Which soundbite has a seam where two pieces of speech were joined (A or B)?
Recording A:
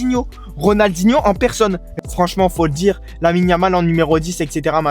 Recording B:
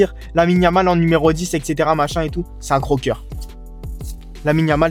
A